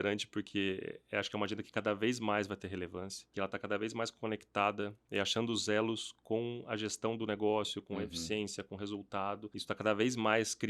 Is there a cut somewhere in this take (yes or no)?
yes